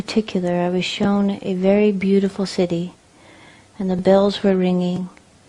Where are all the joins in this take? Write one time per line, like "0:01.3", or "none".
0:03.7